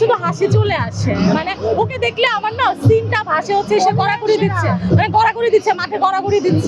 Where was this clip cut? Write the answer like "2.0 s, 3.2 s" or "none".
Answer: none